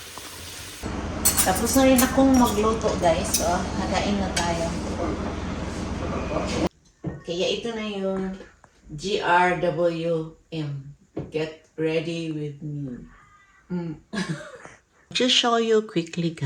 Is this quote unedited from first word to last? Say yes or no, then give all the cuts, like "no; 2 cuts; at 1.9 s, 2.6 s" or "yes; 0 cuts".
no; 3 cuts; at 0.9 s, 6.7 s, 15.0 s